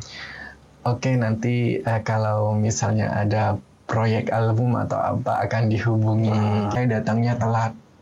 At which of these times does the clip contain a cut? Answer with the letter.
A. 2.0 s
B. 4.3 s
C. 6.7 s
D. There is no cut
C